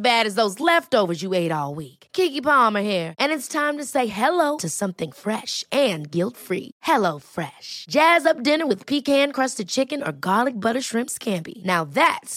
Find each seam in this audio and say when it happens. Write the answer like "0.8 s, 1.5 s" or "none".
none

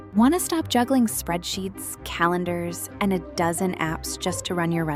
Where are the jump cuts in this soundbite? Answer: none

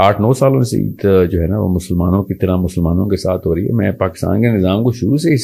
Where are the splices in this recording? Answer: none

